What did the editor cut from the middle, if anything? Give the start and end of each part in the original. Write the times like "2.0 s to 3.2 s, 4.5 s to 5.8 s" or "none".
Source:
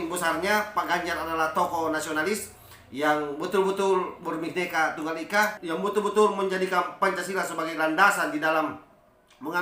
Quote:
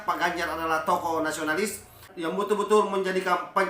2.8 s to 5.6 s